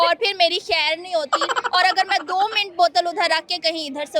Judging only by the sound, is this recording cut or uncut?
uncut